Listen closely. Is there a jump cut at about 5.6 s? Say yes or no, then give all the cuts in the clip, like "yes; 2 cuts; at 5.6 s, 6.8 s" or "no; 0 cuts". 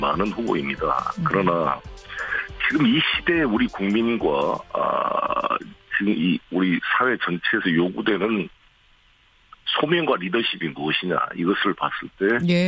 no; 1 cut; at 6.9 s